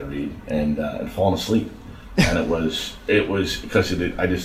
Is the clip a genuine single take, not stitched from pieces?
yes; 0 cuts

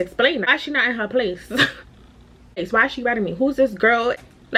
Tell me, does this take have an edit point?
no; 0 cuts

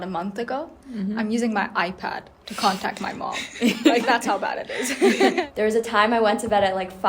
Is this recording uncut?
no; 1 cut; at 5.4 s

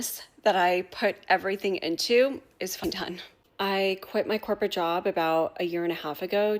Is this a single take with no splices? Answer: no; 1 cut; at 2.8 s

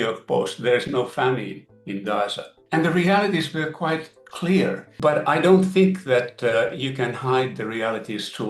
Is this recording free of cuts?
no; 1 cut; at 2.5 s

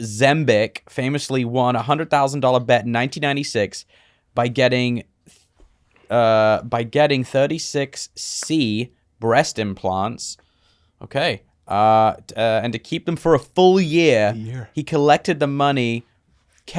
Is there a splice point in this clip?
no; 0 cuts

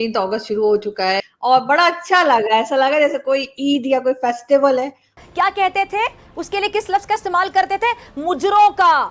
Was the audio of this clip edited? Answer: yes; 2 cuts; at 1.2 s, 5.2 s

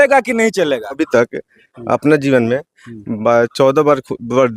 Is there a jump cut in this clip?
yes; 1 cut; at 1.0 s

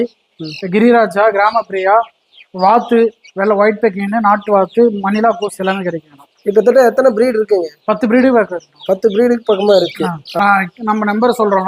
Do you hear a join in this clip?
yes; 1 cut; at 10.3 s

